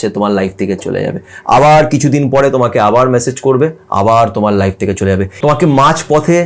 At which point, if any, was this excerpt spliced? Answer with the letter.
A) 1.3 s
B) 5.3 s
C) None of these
B